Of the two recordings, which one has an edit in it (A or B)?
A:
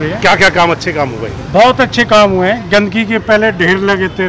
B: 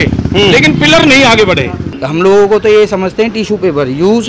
B